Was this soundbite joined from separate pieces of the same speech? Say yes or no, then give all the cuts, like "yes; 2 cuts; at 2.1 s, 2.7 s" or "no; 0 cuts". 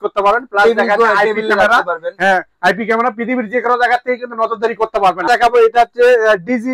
yes; 1 cut; at 5.3 s